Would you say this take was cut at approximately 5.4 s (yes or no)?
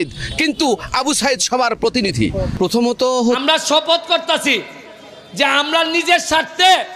no